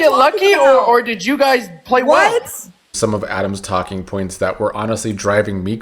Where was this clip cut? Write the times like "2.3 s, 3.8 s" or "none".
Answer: 3.0 s